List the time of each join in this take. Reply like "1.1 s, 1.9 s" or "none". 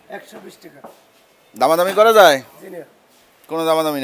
none